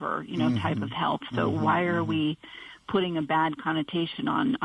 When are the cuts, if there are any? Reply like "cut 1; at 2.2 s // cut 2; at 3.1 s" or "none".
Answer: none

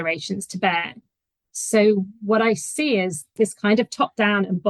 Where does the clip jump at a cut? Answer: cut 1; at 3.3 s

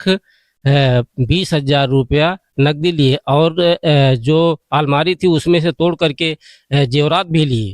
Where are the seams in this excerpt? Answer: none

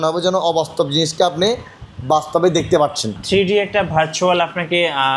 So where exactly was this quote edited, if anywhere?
cut 1; at 3.1 s

